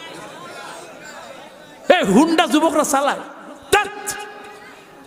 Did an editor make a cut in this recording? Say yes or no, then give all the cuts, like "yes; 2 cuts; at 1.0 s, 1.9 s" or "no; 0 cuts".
no; 0 cuts